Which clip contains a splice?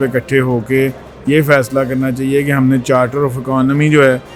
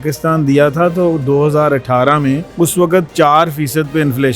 second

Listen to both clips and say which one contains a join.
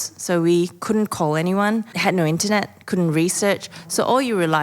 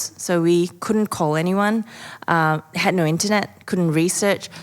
first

